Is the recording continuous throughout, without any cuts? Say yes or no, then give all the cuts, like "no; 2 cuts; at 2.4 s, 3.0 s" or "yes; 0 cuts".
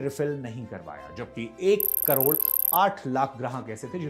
yes; 0 cuts